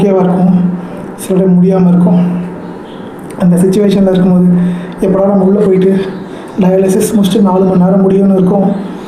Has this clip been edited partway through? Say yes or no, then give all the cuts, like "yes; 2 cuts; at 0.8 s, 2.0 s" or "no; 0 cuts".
no; 0 cuts